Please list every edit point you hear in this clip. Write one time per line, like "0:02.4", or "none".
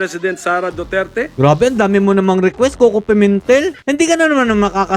0:01.3
0:03.8